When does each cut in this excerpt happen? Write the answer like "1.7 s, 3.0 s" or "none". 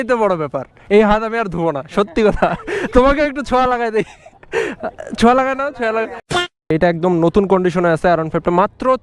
6.7 s